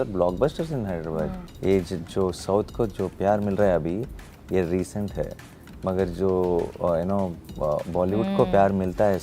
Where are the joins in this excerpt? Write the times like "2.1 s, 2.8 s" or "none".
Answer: 1.4 s